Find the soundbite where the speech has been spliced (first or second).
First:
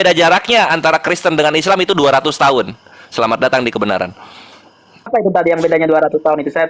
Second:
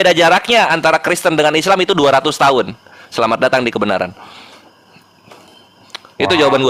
first